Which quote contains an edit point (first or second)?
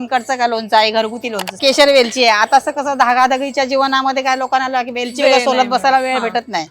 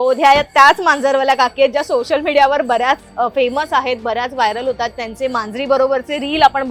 first